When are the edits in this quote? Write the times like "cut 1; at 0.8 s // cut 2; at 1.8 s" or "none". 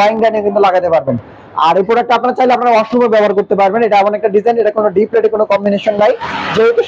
none